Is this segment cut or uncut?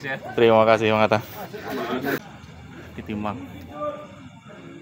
cut